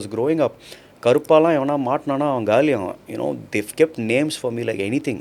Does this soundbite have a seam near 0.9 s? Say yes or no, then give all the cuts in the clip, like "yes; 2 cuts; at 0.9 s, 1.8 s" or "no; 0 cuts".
no; 0 cuts